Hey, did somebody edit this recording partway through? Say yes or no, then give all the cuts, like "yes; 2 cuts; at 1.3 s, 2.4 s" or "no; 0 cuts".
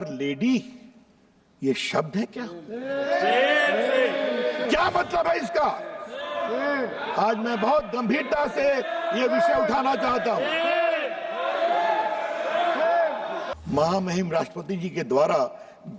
yes; 2 cuts; at 4.6 s, 13.4 s